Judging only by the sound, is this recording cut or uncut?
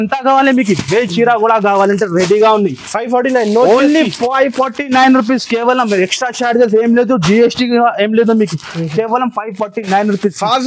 uncut